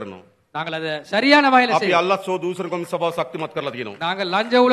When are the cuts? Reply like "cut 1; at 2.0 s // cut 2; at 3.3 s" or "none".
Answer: none